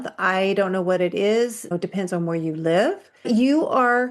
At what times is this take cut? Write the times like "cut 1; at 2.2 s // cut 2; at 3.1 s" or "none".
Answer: cut 1; at 1.7 s // cut 2; at 3.3 s